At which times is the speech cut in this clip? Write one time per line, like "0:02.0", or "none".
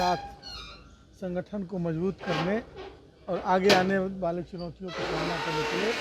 none